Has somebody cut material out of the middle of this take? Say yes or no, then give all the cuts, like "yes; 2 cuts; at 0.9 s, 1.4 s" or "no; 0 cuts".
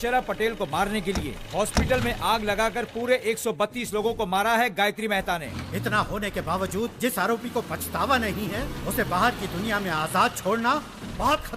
yes; 1 cut; at 5.4 s